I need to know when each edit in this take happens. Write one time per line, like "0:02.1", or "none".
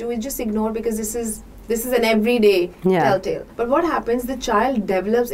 0:03.5